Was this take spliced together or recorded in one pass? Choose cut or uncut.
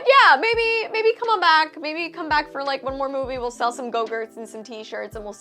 uncut